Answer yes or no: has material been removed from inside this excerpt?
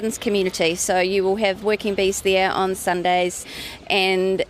yes